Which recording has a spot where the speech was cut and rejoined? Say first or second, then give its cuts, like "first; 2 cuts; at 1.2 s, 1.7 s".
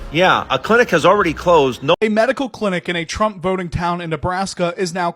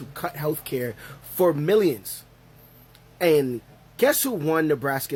first; 1 cut; at 2.0 s